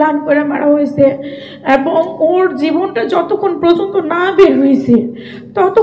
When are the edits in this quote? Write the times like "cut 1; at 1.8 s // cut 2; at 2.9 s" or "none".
none